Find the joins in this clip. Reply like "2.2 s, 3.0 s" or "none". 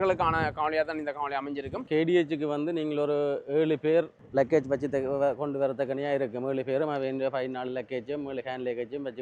1.9 s, 4.2 s